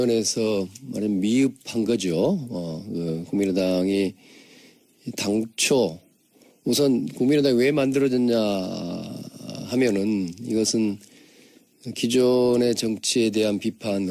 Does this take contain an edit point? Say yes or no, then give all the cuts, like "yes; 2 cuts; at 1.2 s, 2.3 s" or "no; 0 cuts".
no; 0 cuts